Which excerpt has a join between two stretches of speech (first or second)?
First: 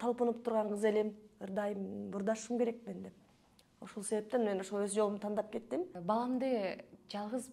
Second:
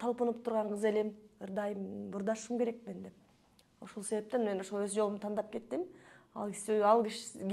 first